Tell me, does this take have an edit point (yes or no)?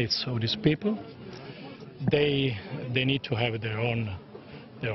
no